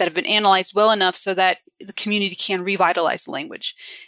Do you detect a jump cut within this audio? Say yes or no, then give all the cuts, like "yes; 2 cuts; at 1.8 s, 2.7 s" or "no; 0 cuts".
no; 0 cuts